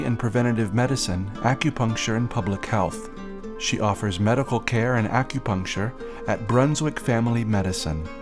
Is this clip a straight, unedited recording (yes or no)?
yes